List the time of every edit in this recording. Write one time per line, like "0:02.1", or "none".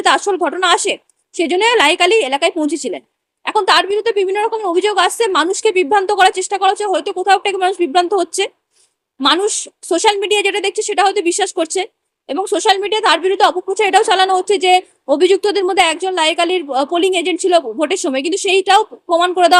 none